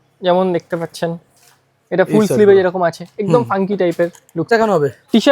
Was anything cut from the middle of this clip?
yes; 1 cut; at 4.4 s

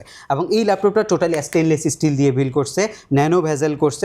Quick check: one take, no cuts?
yes; 0 cuts

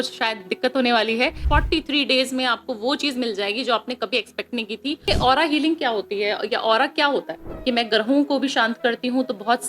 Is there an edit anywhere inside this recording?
yes; 3 cuts; at 1.4 s, 5.1 s, 7.5 s

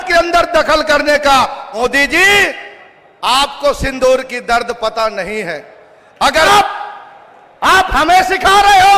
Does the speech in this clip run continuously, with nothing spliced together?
no; 2 cuts; at 1.6 s, 6.5 s

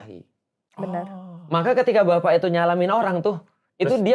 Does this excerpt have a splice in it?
no; 0 cuts

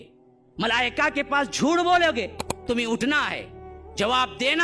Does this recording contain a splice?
yes; 1 cut; at 2.6 s

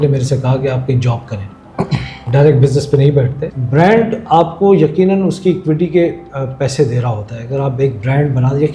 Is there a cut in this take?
yes; 1 cut; at 3.5 s

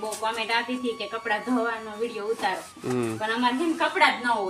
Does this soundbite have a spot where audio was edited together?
no; 0 cuts

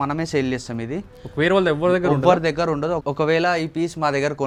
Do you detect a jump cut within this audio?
no; 0 cuts

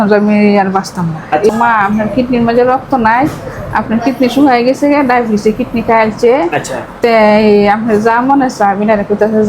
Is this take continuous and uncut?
no; 1 cut; at 1.5 s

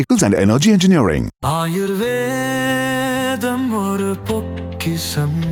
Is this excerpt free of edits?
yes; 0 cuts

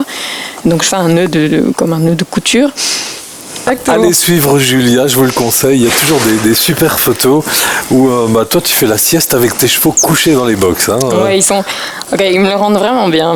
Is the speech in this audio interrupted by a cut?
yes; 1 cut; at 3.7 s

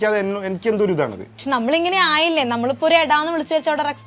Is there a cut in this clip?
yes; 1 cut; at 1.4 s

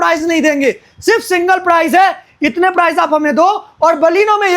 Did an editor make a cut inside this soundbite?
no; 0 cuts

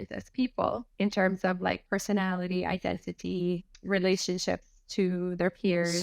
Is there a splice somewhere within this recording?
yes; 2 cuts; at 0.9 s, 3.7 s

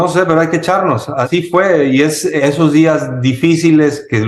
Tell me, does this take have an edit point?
yes; 2 cuts; at 1.3 s, 2.4 s

